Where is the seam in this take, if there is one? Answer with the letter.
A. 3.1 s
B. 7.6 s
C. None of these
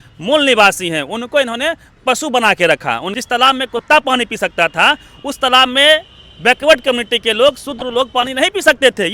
A